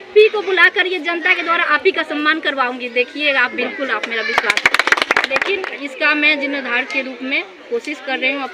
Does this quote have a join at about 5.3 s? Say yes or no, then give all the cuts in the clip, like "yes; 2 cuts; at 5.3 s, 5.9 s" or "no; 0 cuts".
yes; 1 cut; at 5.3 s